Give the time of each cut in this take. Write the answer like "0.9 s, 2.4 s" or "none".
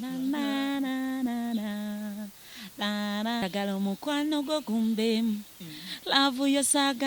3.4 s